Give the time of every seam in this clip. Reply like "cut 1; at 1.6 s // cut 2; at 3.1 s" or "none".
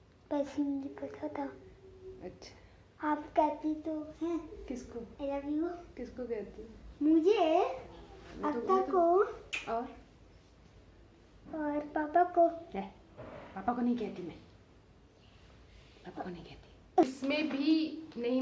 cut 1; at 17.0 s